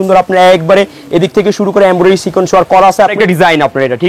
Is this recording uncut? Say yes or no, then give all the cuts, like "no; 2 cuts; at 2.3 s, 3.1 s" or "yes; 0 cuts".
no; 1 cut; at 3.1 s